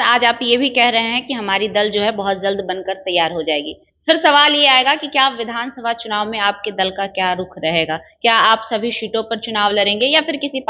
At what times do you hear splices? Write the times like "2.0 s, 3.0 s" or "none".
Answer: none